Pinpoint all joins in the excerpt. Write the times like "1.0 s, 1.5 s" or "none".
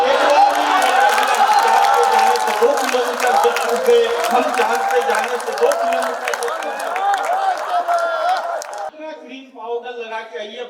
8.9 s